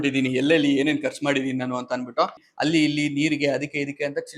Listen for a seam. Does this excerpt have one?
yes; 1 cut; at 2.3 s

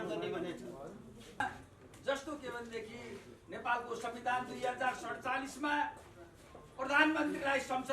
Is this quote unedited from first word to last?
no; 1 cut; at 1.4 s

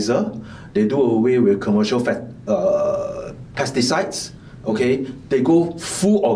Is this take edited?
no; 0 cuts

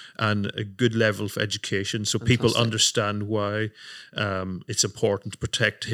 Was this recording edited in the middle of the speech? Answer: no; 0 cuts

